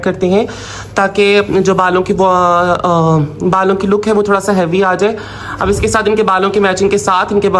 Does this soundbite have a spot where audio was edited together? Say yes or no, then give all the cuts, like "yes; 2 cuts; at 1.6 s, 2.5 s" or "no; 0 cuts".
no; 0 cuts